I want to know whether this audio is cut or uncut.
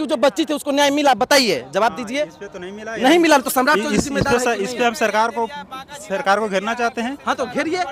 uncut